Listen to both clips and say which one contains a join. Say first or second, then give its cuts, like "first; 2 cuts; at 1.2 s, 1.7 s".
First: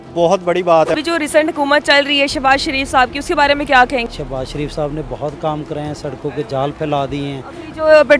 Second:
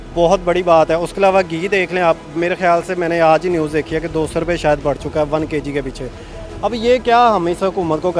first; 2 cuts; at 1.0 s, 4.0 s